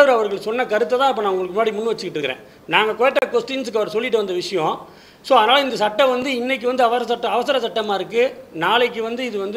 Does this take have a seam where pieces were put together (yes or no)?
no